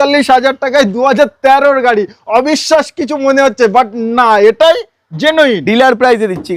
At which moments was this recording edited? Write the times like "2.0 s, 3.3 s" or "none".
none